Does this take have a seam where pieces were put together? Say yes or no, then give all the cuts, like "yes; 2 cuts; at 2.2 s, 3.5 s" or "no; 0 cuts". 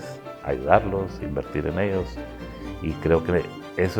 no; 0 cuts